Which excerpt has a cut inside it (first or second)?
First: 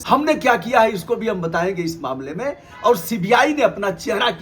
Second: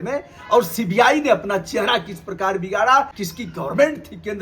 second